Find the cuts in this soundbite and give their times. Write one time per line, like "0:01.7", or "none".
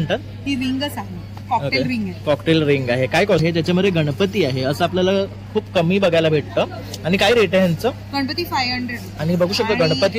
0:03.4